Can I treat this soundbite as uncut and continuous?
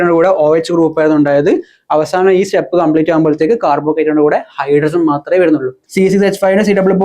no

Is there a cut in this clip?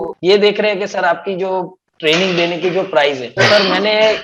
no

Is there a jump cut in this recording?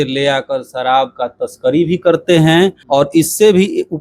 yes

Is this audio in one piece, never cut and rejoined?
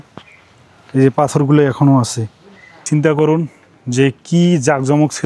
no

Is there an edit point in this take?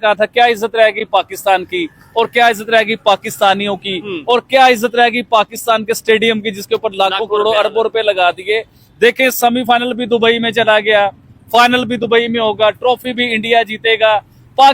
no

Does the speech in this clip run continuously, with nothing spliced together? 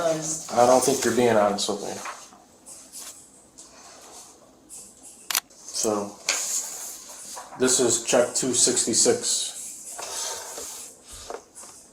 yes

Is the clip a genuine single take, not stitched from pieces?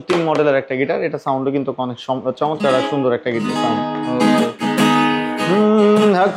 yes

